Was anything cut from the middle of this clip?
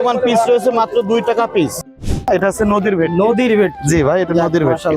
yes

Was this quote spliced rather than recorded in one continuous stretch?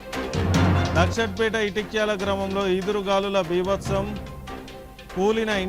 yes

